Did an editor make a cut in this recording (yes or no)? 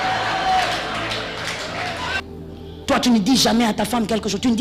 yes